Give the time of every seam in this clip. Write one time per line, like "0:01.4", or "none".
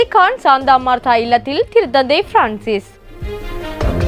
0:03.2